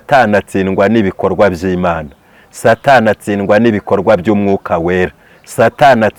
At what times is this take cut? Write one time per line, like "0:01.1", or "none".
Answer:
none